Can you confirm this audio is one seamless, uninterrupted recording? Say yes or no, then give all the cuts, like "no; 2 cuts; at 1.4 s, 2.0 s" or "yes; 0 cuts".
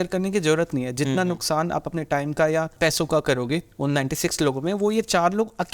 no; 2 cuts; at 2.7 s, 3.7 s